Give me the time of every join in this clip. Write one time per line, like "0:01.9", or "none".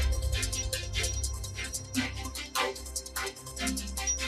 0:02.7